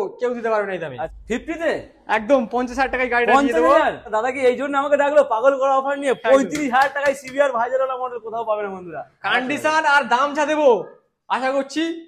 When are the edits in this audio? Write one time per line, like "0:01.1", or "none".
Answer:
0:01.1
0:04.1
0:09.1